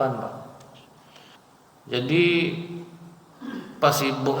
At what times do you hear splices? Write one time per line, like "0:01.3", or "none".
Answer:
0:01.4